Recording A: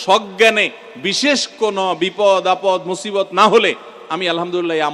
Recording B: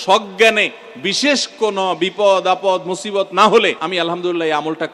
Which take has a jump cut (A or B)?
B